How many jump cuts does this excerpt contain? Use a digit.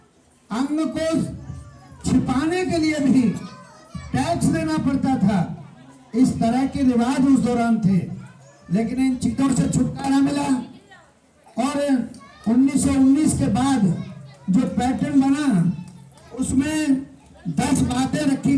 0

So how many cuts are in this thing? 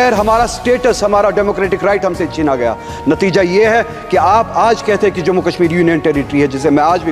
0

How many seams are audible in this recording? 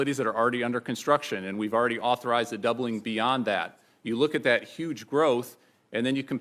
1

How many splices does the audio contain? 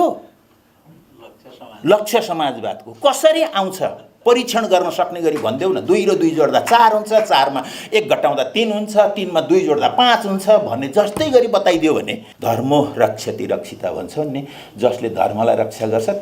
1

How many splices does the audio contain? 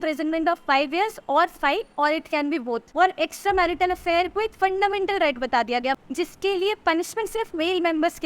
2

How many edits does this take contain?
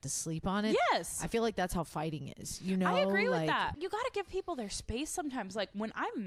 1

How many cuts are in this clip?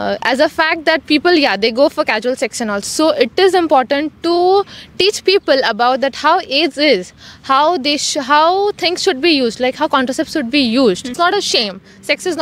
1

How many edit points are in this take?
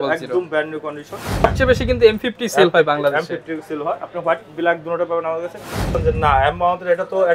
2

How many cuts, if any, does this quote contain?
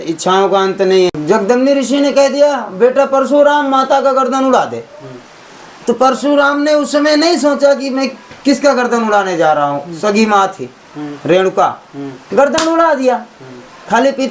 1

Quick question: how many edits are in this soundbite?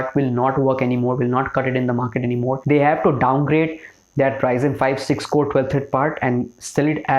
1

